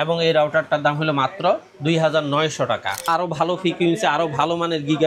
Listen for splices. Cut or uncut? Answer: cut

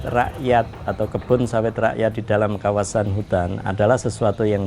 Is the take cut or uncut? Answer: uncut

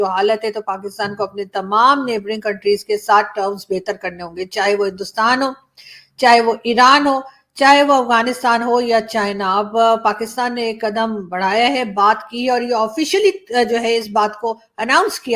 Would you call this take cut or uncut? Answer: uncut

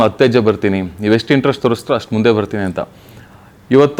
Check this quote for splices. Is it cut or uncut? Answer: uncut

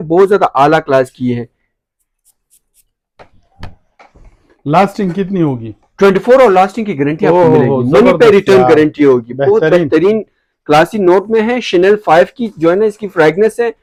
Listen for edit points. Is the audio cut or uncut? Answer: uncut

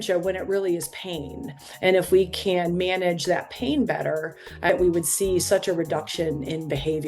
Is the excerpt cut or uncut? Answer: cut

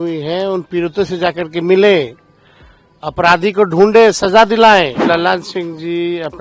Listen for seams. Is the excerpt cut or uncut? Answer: cut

